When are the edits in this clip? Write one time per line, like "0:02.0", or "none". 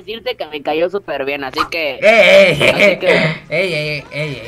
none